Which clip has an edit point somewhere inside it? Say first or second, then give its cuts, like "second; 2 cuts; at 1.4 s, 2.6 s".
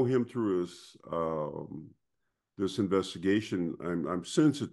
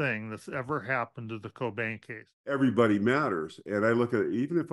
second; 1 cut; at 2.5 s